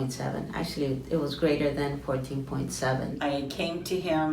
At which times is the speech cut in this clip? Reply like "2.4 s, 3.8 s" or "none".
3.1 s